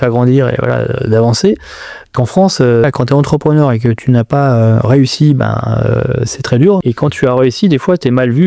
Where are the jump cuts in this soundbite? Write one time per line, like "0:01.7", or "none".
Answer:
0:02.8
0:06.8

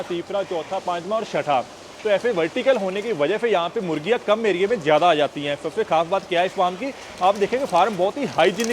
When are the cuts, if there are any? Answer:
none

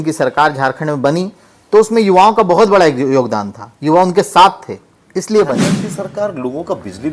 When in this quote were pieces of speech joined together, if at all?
0:05.7

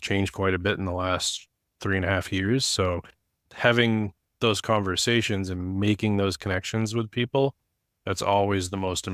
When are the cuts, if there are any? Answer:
0:03.4

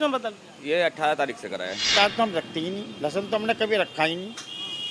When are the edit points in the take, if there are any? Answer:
0:01.9

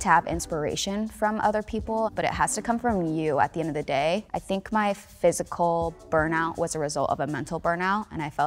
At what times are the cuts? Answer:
0:02.1
0:04.3

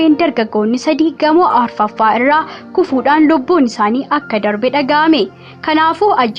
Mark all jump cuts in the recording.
none

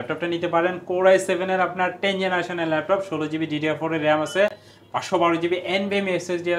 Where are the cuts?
none

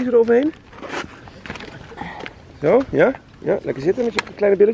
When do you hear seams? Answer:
0:01.9

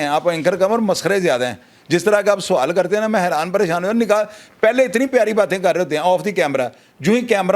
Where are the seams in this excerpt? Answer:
none

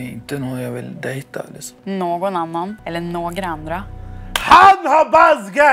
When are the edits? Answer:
0:01.7
0:02.8

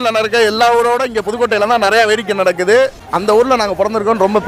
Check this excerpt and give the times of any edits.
none

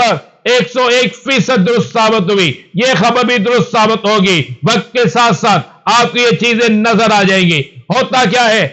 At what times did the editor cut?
none

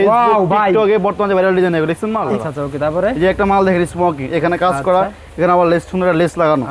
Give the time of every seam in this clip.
0:02.3

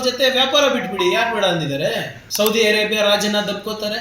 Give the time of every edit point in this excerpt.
0:02.2

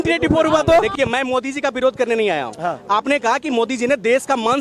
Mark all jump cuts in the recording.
0:00.9

